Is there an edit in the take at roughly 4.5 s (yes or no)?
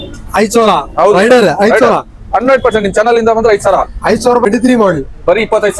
yes